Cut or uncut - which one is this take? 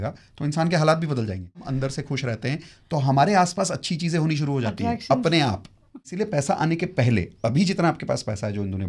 cut